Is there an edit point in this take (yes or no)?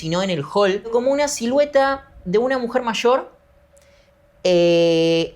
yes